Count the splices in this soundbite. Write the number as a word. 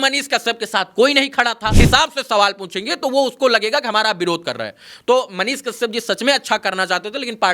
one